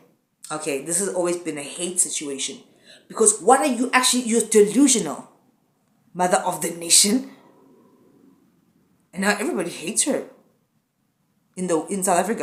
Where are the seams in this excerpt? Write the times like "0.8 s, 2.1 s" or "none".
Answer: none